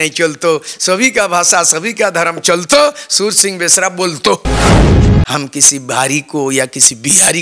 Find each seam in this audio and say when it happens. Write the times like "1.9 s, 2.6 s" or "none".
4.4 s, 5.3 s